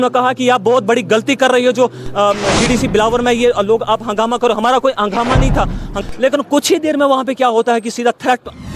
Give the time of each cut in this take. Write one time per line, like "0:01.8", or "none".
0:05.9